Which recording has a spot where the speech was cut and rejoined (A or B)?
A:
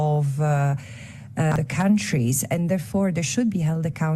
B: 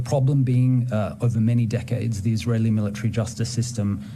A